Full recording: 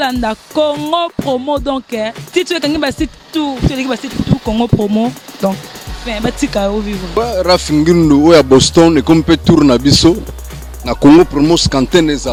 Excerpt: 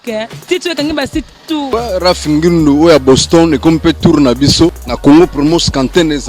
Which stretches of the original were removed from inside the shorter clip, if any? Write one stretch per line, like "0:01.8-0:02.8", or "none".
0:03.5-0:07.1
0:10.3-0:10.8